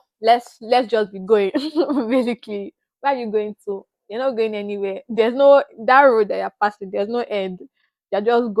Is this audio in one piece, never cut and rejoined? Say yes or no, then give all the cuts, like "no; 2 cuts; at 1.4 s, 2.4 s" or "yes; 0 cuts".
yes; 0 cuts